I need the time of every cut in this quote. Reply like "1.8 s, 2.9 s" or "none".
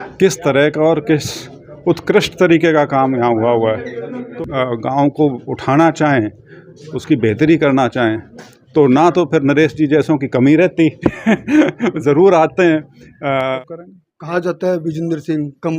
4.3 s, 13.6 s

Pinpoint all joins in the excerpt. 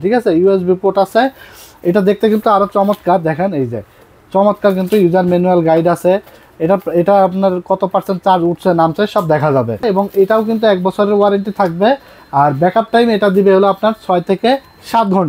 9.8 s

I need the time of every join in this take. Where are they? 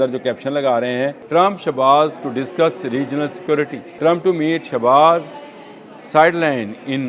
1.2 s, 3.8 s

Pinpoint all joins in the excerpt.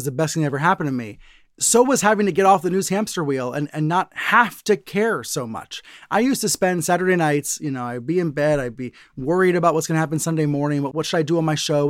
10.9 s

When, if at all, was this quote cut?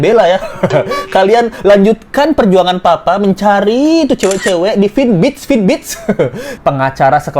6.5 s

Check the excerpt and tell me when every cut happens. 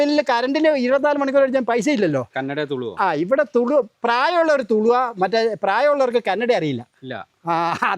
2.3 s

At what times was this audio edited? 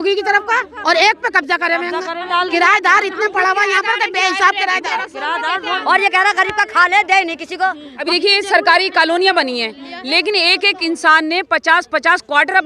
2.3 s, 5.7 s, 7.9 s

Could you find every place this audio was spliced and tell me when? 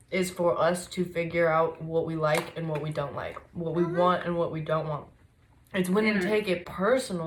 none

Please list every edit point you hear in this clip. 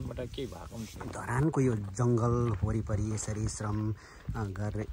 1.0 s

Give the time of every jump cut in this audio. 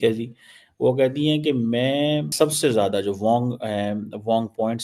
2.3 s

